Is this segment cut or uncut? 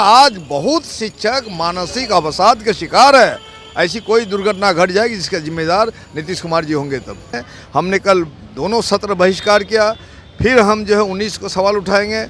cut